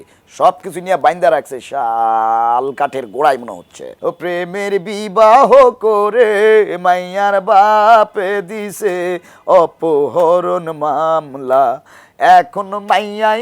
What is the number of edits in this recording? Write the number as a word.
one